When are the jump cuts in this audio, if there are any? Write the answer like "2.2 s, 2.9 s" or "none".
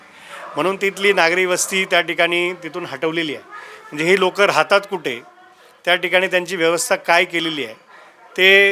none